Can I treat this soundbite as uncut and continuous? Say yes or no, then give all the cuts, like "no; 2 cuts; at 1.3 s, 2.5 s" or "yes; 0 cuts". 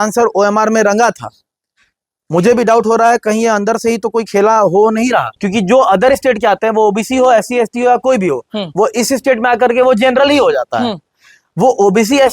no; 1 cut; at 5.3 s